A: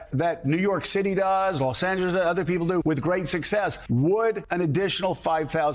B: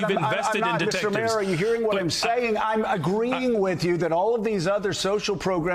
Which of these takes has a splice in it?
A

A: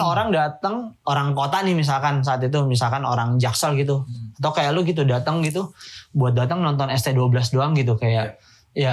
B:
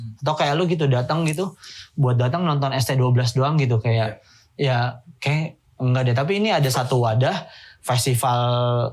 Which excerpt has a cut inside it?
A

